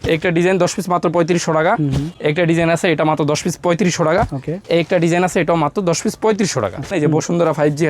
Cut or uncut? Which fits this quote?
cut